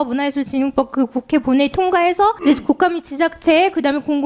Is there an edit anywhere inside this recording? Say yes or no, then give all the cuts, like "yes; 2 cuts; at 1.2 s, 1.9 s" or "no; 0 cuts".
yes; 1 cut; at 2.4 s